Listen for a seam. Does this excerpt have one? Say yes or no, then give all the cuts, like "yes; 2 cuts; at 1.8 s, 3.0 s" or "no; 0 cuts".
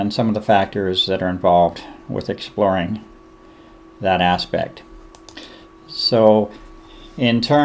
no; 0 cuts